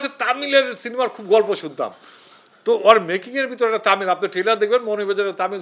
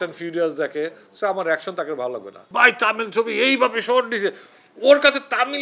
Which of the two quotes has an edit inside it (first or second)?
second